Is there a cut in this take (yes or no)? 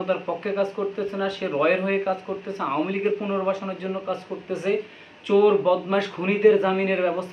no